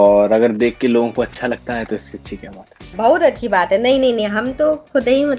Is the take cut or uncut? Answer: cut